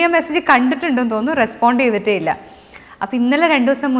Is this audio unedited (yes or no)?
yes